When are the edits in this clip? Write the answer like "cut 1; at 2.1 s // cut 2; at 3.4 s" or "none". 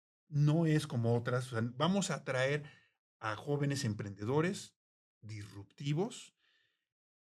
none